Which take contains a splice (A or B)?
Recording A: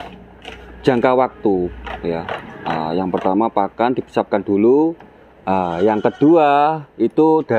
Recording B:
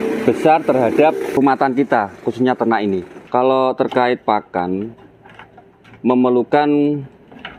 B